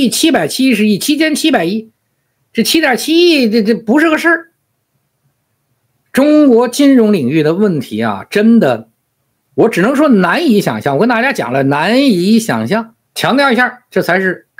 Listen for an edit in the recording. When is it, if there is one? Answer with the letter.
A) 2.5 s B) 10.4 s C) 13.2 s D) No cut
C